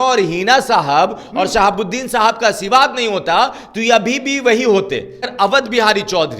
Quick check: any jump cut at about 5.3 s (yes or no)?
yes